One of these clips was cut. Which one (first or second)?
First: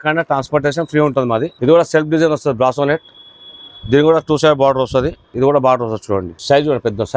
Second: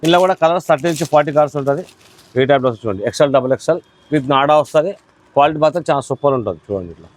first